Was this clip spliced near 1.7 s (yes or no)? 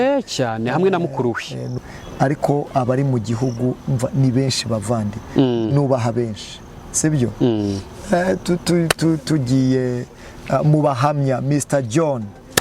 yes